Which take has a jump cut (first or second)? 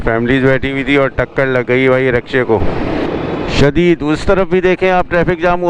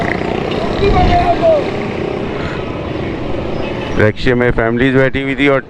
first